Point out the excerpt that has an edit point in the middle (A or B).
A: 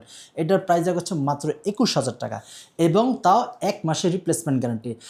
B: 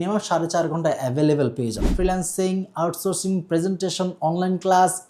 B